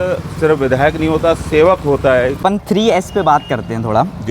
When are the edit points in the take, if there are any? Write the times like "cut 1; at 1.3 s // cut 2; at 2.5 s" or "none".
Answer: cut 1; at 2.4 s